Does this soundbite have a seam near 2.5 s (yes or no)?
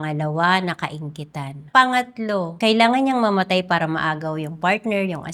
yes